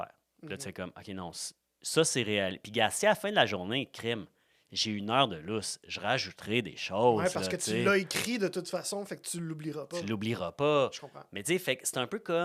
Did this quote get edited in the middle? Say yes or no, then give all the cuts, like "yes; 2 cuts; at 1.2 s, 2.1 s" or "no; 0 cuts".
no; 0 cuts